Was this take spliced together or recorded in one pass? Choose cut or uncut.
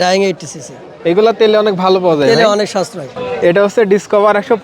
cut